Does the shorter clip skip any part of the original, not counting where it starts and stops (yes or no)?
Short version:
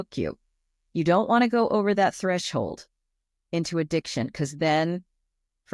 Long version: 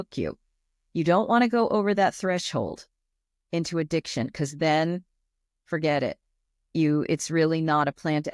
no